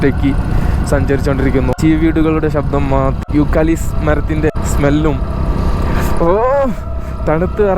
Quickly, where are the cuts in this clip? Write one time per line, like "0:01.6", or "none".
0:01.8
0:03.2
0:04.5